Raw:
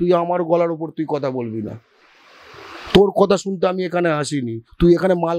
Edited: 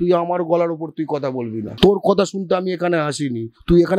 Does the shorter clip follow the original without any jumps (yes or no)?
no